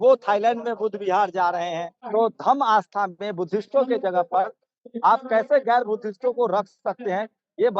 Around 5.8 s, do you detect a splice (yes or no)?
no